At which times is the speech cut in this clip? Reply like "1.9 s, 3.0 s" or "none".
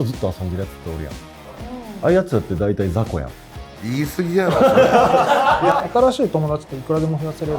5.7 s